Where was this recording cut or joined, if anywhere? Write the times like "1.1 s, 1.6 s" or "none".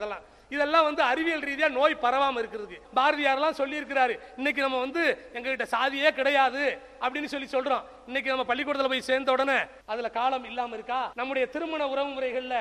2.8 s, 9.8 s, 11.1 s